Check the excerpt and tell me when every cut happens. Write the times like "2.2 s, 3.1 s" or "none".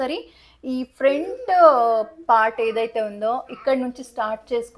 none